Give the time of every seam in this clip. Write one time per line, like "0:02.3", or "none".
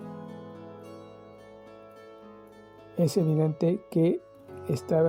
0:02.9

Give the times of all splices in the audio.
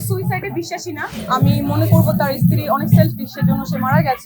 0:01.2

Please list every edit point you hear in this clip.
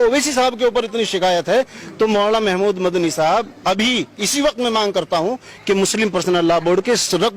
none

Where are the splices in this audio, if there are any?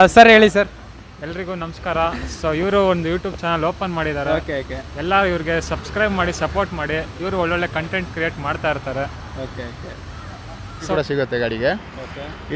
0:10.9

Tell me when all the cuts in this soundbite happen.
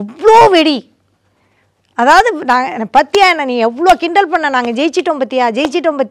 none

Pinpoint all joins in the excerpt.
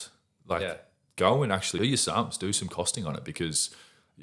0:01.8

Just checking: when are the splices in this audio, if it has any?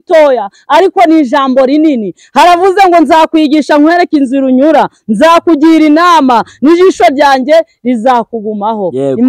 none

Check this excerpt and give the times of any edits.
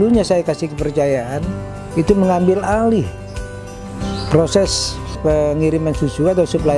0:05.2

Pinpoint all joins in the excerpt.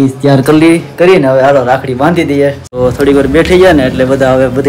0:02.6

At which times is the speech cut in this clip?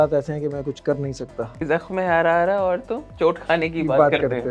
0:01.6

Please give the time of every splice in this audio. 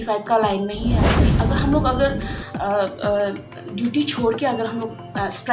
0:01.3

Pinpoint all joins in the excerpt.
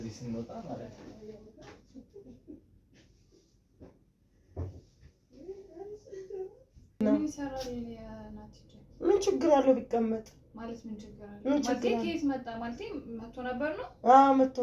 0:07.0

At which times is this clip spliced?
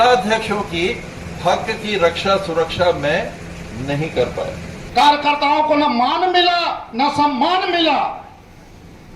0:04.7

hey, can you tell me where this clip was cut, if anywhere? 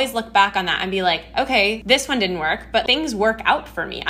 0:01.8
0:02.8

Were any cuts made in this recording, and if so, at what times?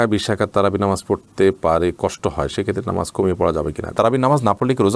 0:03.9

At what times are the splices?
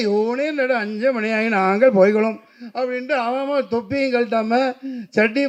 none

